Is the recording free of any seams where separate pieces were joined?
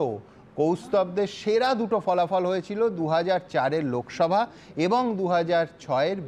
yes; 0 cuts

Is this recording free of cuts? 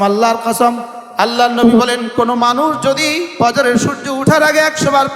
no; 2 cuts; at 0.9 s, 3.4 s

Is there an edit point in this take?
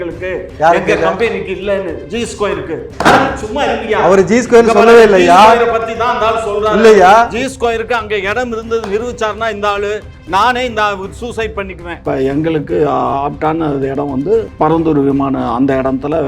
yes; 3 cuts; at 2.9 s, 12.0 s, 14.5 s

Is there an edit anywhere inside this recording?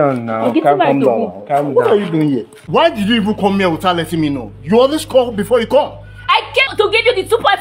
yes; 2 cuts; at 2.5 s, 6.7 s

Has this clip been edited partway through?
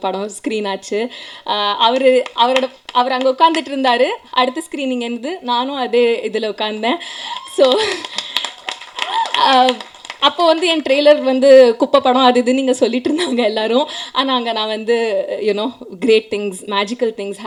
no; 0 cuts

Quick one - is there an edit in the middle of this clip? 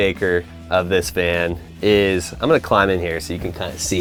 no; 0 cuts

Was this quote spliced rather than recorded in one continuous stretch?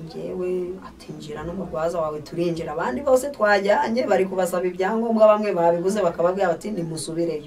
no; 0 cuts

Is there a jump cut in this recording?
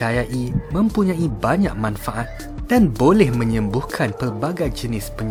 no; 0 cuts

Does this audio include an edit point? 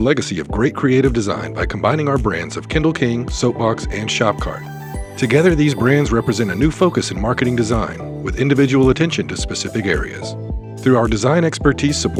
no; 0 cuts

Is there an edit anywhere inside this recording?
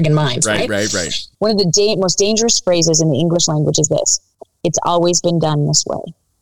yes; 1 cut; at 1.2 s

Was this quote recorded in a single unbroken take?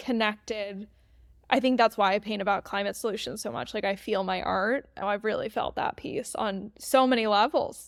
yes; 0 cuts

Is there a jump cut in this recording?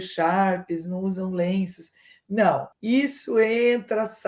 yes; 1 cut; at 2.7 s

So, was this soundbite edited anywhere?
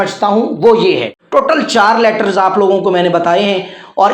yes; 1 cut; at 1.1 s

